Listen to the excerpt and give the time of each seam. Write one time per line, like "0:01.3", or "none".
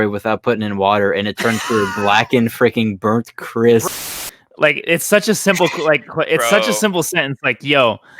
0:03.9